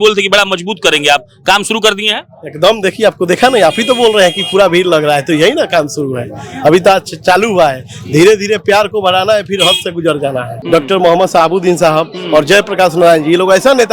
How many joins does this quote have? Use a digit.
1